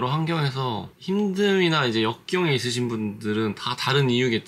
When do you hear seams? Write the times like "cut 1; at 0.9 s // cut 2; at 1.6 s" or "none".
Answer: cut 1; at 0.9 s